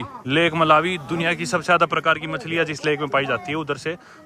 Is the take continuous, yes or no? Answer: yes